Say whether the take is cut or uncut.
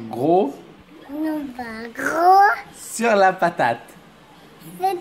uncut